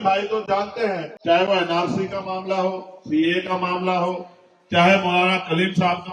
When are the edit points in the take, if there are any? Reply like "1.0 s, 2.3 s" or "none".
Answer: 1.1 s